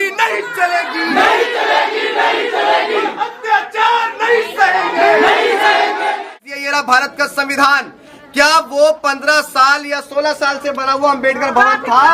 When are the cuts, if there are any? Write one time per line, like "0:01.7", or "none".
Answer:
0:06.3